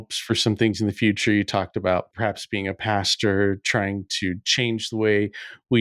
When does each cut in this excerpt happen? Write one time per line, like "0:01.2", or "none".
0:02.1